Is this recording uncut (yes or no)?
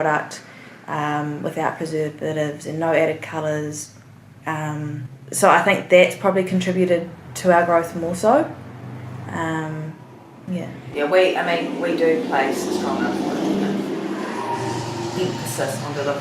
no